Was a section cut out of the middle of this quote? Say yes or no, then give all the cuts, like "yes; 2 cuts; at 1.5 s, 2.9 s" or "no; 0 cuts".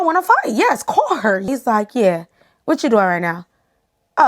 yes; 1 cut; at 1.4 s